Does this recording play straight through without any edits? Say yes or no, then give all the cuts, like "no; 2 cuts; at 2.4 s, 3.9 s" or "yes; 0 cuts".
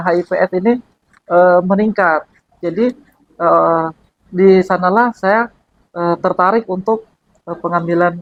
yes; 0 cuts